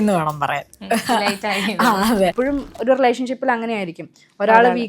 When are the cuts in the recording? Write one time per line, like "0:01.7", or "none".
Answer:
0:02.3